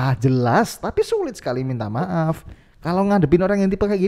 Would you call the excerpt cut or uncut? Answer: uncut